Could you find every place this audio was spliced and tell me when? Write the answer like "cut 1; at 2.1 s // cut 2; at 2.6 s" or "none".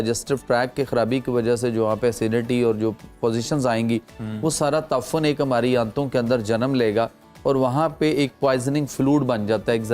none